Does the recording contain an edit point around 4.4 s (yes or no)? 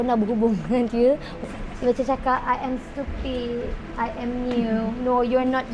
no